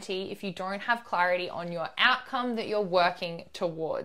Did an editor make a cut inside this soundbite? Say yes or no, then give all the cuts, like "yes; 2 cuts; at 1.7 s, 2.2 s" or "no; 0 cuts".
no; 0 cuts